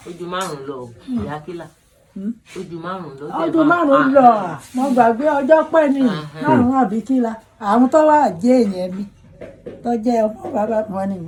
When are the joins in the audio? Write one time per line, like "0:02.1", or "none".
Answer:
none